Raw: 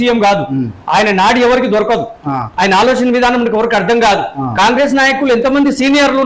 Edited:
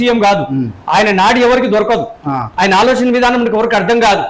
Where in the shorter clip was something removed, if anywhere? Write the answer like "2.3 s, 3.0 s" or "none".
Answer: none